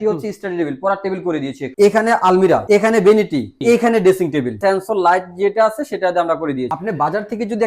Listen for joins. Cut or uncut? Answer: cut